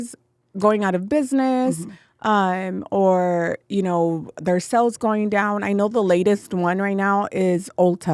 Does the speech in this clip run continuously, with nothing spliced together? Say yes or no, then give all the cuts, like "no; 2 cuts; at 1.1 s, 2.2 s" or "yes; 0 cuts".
yes; 0 cuts